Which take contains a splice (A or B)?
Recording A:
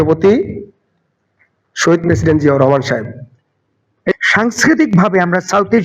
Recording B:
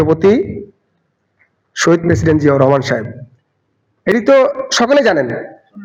A